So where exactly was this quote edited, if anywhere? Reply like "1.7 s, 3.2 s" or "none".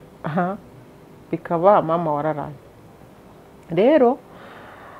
none